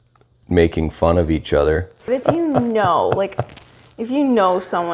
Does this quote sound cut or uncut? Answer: cut